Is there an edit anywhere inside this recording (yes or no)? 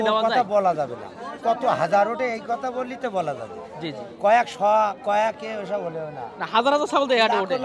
no